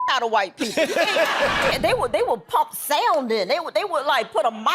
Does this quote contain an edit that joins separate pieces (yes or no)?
yes